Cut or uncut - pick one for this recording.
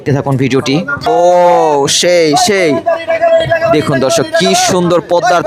cut